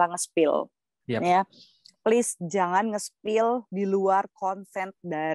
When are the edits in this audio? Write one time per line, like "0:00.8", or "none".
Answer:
none